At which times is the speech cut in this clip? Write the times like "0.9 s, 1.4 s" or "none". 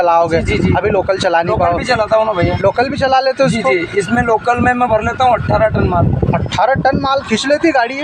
none